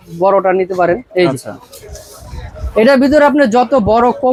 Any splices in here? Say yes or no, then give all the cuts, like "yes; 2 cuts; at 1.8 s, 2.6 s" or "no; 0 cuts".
no; 0 cuts